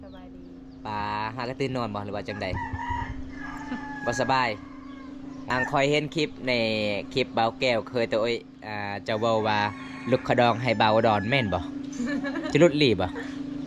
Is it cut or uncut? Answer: cut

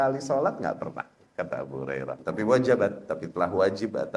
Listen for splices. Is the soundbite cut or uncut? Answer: cut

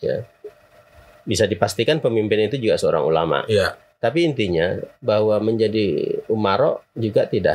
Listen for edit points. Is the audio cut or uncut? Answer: cut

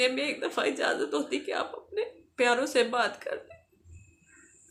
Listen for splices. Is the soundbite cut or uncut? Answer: uncut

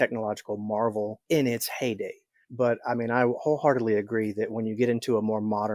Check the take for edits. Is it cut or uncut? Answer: uncut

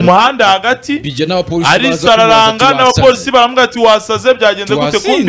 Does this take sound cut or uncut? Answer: uncut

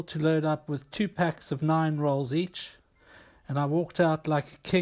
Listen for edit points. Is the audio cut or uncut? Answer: uncut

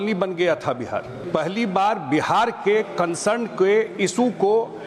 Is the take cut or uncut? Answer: cut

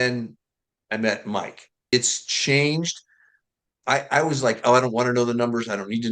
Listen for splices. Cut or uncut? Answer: cut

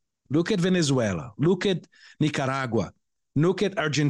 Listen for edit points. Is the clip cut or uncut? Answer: uncut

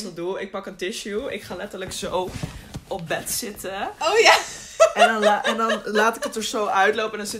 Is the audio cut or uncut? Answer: uncut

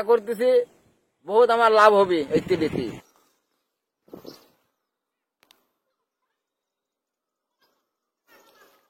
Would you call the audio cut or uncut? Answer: uncut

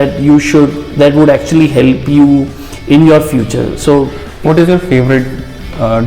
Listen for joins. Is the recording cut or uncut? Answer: cut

